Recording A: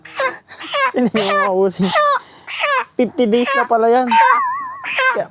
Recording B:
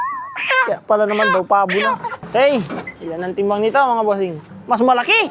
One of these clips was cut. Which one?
B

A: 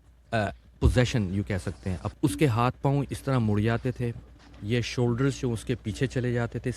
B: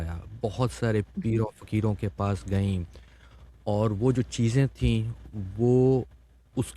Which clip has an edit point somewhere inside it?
A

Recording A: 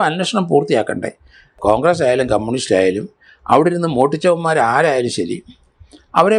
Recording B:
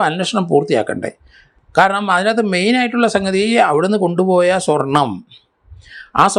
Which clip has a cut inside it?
A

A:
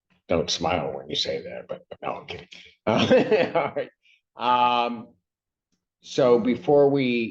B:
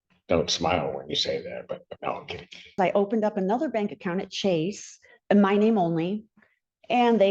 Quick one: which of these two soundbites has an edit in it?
B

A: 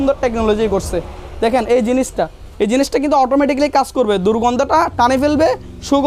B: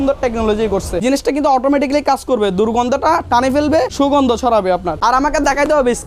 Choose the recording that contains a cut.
B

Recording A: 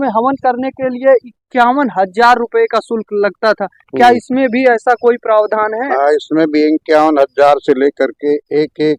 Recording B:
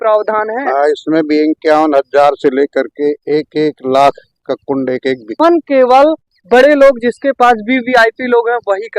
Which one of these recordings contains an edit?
B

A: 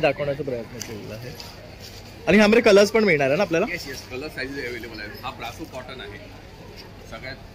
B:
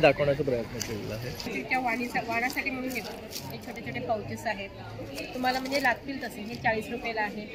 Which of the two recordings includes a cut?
B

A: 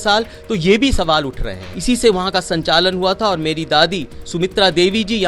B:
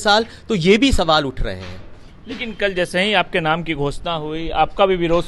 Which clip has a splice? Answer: A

